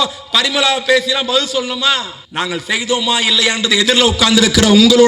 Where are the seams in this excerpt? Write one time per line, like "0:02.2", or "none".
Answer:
0:02.2